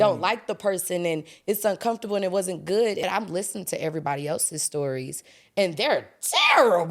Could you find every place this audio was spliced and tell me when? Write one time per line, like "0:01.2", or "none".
0:03.0